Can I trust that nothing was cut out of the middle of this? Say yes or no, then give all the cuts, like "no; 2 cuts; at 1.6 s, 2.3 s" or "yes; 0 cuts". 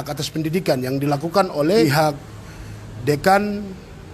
no; 1 cut; at 1.8 s